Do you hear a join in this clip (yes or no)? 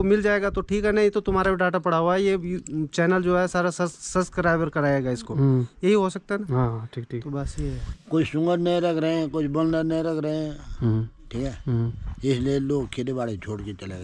yes